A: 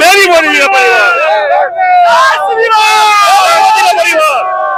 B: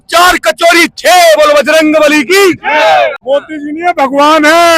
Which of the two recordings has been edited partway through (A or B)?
B